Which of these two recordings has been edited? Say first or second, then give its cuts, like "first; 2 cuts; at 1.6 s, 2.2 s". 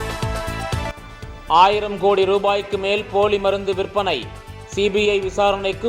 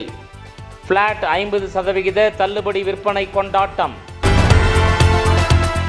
first; 1 cut; at 1.0 s